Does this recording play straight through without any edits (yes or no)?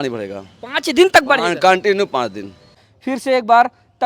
no